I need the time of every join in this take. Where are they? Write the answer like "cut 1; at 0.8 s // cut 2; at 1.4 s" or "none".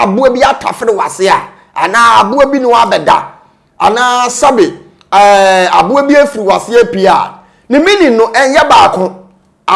none